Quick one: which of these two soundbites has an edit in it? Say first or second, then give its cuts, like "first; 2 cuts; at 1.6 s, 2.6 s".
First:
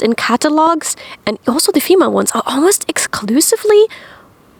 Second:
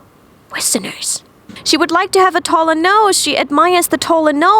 second; 1 cut; at 1.6 s